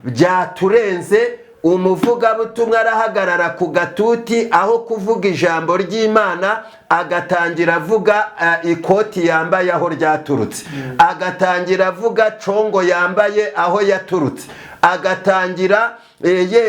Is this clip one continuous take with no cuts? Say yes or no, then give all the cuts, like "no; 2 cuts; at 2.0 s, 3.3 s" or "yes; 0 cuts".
yes; 0 cuts